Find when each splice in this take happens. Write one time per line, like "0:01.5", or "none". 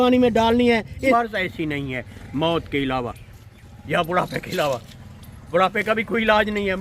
0:01.1